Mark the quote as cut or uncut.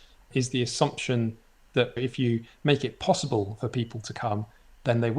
cut